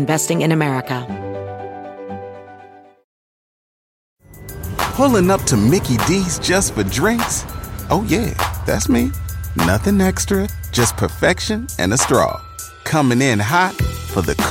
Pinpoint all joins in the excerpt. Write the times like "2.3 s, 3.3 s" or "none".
1.0 s